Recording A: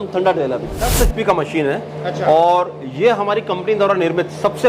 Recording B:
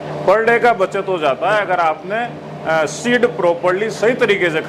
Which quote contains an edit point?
A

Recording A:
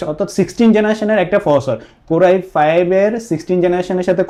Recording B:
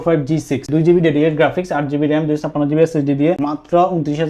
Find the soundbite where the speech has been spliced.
B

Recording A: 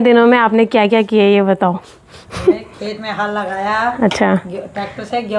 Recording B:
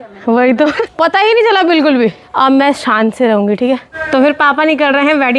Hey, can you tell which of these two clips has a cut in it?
B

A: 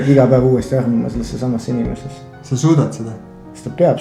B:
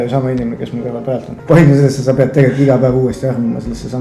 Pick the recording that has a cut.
B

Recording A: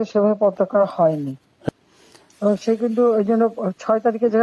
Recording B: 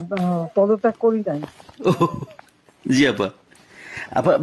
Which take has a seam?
A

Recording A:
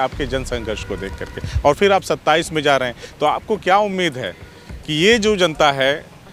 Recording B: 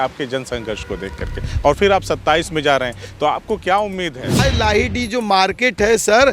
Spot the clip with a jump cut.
B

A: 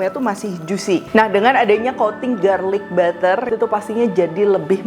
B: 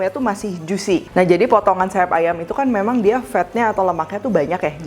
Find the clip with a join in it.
A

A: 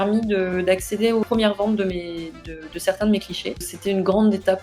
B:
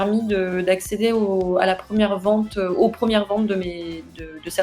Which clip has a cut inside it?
A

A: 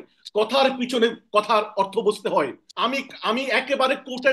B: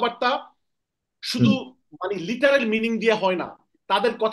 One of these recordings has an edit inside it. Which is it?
A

